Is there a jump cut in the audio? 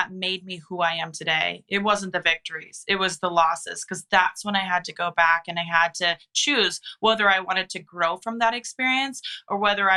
no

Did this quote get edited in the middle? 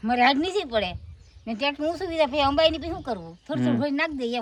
no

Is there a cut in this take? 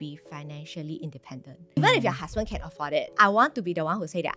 yes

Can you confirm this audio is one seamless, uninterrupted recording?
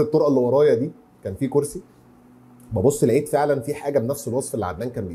yes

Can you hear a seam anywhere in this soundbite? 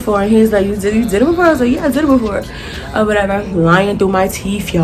no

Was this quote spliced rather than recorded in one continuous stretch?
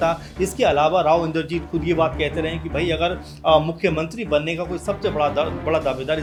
no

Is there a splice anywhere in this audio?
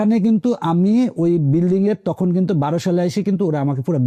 no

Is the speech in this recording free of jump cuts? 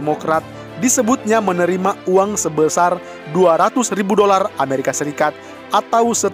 yes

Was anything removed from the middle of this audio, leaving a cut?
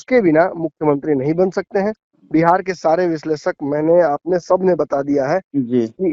no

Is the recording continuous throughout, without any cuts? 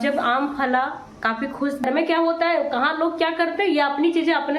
no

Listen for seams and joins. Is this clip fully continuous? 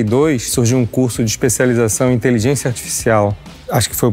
yes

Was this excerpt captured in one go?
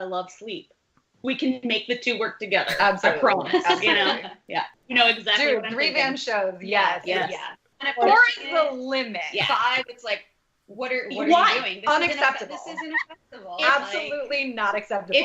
no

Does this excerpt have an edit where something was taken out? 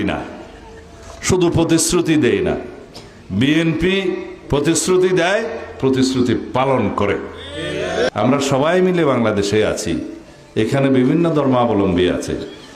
yes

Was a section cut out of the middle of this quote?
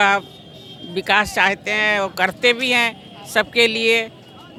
no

